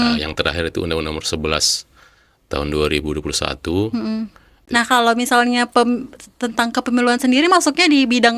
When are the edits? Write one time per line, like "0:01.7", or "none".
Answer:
0:04.5